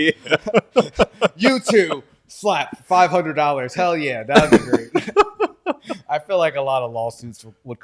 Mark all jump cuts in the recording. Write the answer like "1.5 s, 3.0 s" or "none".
none